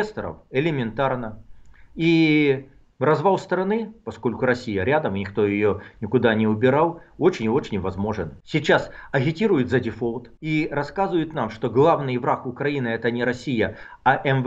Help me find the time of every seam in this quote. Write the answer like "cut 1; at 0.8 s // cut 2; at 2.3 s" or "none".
cut 1; at 8.3 s // cut 2; at 10.3 s